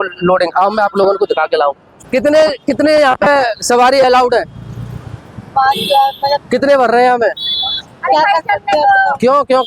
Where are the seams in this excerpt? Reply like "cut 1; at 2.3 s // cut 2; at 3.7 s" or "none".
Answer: cut 1; at 1.9 s